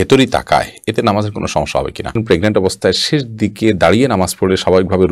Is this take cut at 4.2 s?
no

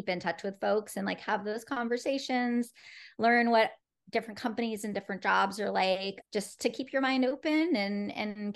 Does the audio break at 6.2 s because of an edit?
yes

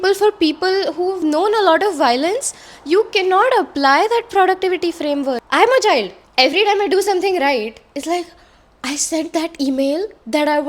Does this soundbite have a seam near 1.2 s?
yes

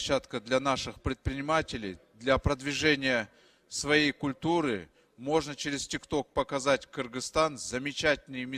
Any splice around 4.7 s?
no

